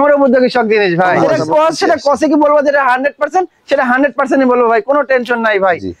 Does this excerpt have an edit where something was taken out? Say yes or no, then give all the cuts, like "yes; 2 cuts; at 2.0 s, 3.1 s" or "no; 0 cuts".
yes; 1 cut; at 1.3 s